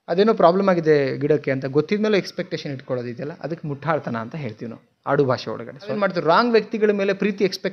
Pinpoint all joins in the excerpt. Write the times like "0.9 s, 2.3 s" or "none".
5.9 s